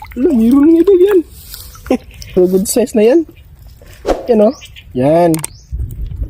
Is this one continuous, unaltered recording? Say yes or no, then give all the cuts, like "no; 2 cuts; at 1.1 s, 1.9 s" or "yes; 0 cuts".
yes; 0 cuts